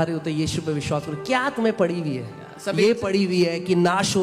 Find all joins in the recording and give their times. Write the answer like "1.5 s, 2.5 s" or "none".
none